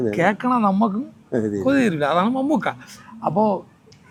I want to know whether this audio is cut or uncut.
uncut